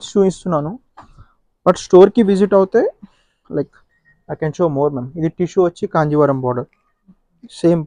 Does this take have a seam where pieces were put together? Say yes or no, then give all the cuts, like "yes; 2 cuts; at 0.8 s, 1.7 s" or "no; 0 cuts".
no; 0 cuts